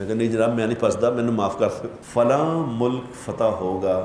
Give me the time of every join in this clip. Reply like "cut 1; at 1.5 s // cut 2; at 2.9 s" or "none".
cut 1; at 1.9 s